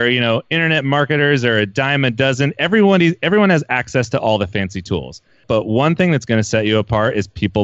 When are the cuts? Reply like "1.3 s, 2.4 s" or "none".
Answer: 5.4 s